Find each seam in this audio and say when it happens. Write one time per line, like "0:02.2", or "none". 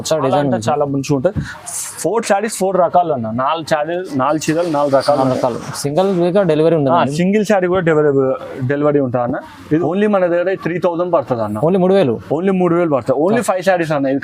none